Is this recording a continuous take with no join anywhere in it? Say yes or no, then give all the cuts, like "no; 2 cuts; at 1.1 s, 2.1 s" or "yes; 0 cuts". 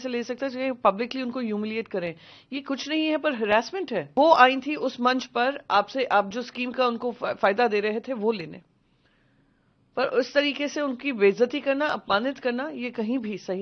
no; 1 cut; at 4.1 s